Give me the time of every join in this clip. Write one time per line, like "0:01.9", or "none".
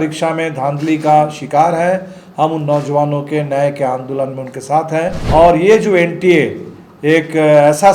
0:05.2

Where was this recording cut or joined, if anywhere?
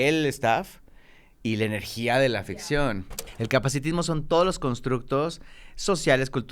0:03.2

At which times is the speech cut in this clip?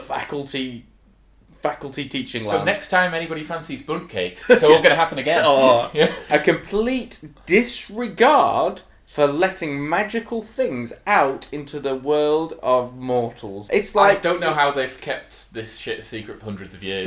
0:06.3
0:13.6

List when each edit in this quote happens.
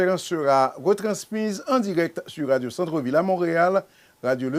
none

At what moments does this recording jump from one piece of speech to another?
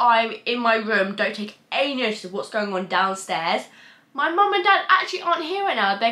none

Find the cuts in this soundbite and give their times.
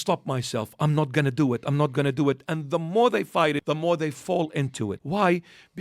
0:03.6
0:05.0

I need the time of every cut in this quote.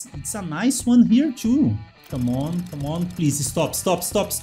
0:02.0

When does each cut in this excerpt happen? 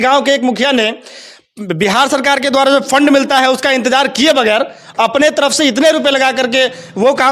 none

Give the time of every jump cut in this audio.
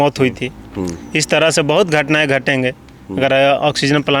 none

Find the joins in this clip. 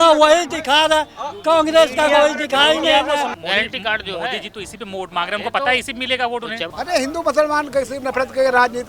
0:03.3
0:06.6

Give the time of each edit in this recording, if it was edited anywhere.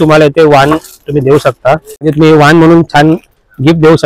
0:02.0

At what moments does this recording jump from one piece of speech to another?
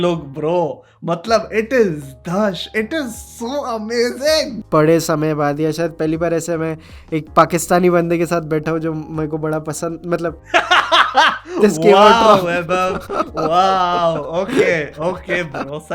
0:04.6

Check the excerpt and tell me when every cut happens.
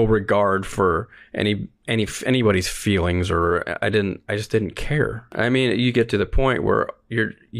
0:05.2

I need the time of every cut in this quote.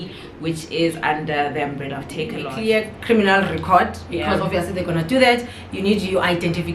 0:02.5

